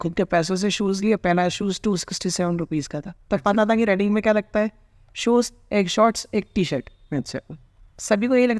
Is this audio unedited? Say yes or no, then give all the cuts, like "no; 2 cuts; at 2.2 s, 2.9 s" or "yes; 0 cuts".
yes; 0 cuts